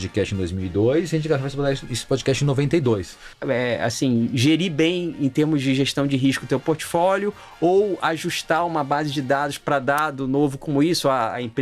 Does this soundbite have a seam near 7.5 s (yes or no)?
no